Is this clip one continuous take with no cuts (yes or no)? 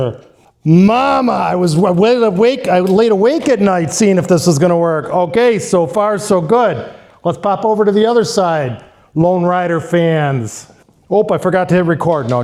yes